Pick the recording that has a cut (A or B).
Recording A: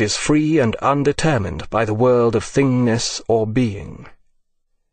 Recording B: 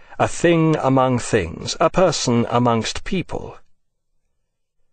B